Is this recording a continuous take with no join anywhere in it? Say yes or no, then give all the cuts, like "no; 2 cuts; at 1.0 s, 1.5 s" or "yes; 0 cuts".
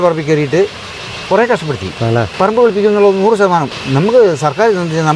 no; 2 cuts; at 2.3 s, 3.8 s